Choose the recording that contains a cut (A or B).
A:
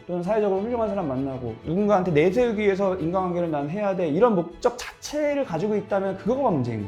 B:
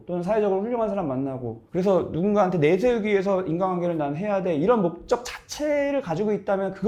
A